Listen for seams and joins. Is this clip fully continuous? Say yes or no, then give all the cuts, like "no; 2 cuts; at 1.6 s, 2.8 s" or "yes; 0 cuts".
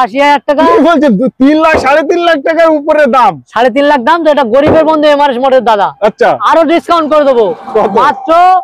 yes; 0 cuts